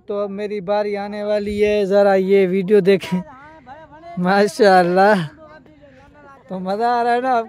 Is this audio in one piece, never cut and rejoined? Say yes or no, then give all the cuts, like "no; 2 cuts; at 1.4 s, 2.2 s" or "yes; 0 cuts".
yes; 0 cuts